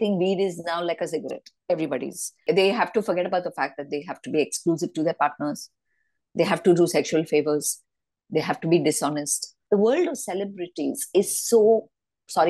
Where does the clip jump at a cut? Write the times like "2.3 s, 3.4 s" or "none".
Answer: 2.4 s, 9.5 s